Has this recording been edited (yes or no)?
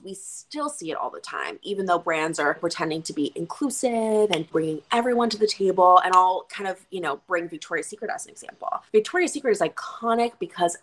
yes